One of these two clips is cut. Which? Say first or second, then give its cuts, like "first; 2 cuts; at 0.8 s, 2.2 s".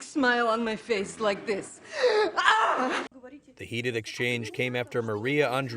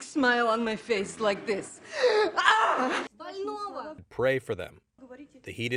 first; 1 cut; at 3.2 s